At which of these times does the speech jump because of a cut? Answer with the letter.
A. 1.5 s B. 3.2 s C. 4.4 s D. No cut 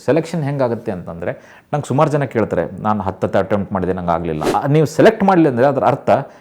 C